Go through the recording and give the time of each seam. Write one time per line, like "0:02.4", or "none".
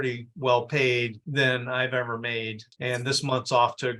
0:02.7

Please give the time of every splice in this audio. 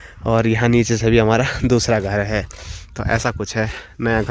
none

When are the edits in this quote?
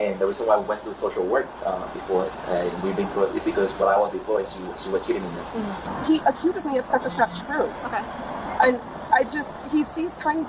0:05.9

